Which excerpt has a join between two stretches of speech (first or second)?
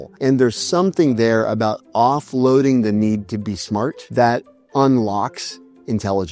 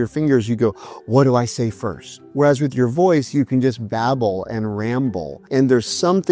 first